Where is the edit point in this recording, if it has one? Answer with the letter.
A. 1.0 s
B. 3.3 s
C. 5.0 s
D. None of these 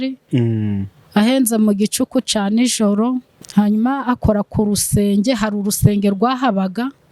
B